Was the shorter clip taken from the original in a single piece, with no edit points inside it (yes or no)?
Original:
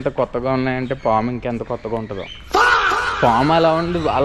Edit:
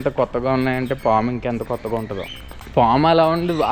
no